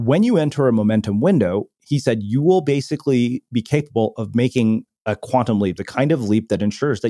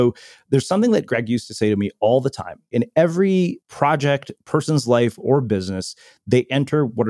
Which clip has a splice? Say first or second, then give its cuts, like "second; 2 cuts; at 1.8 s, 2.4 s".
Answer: second; 2 cuts; at 2.7 s, 3.6 s